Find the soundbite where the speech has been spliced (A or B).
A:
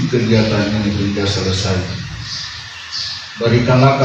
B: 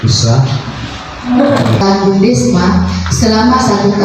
B